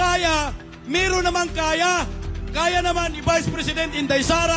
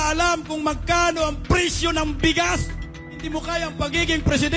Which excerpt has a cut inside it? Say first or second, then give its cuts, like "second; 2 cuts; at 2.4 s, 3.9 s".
second; 1 cut; at 3.3 s